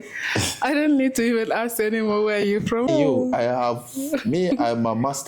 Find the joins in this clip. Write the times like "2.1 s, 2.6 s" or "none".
2.9 s